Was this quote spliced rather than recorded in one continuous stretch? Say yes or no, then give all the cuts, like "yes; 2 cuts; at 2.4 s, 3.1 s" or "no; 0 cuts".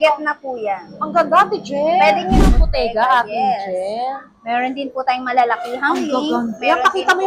yes; 1 cut; at 2.5 s